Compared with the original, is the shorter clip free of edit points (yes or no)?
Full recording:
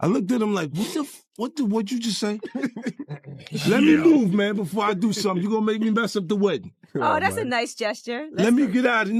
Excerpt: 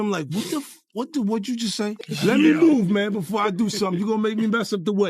no